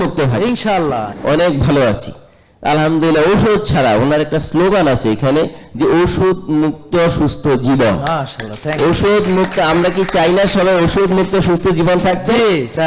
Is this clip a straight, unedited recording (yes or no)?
no